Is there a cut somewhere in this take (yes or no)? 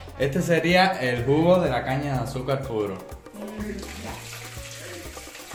no